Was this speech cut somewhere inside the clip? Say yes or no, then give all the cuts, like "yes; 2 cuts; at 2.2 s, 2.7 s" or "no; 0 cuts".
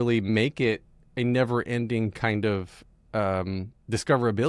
no; 0 cuts